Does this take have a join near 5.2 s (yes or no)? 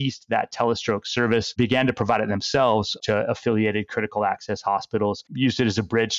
yes